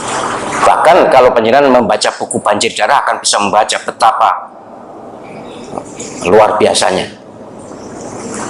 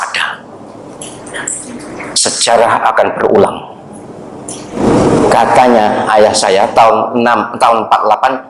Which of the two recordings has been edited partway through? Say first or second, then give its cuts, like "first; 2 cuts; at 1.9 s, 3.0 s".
second; 1 cut; at 4.8 s